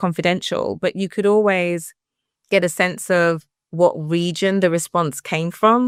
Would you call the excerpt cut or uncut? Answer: uncut